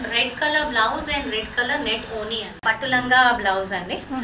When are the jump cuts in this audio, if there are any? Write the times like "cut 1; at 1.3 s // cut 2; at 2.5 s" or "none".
cut 1; at 2.6 s

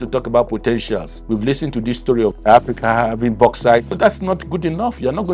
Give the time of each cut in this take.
cut 1; at 1.1 s

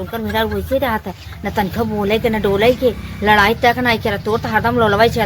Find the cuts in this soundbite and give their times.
none

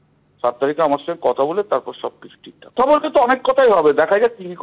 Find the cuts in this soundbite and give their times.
cut 1; at 2.8 s

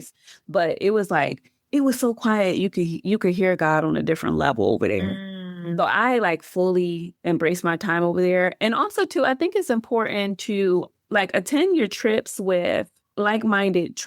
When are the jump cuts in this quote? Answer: cut 1; at 11.0 s // cut 2; at 13.0 s

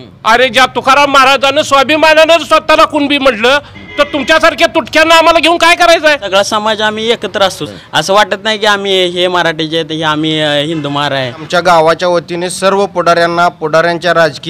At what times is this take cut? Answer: cut 1; at 6.2 s // cut 2; at 7.6 s // cut 3; at 11.5 s

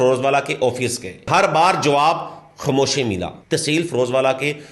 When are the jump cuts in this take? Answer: cut 1; at 1.3 s // cut 2; at 3.4 s

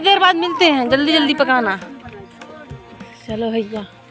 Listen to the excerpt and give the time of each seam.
none

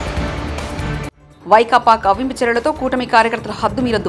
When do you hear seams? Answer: cut 1; at 1.2 s

